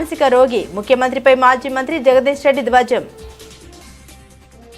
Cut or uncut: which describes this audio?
uncut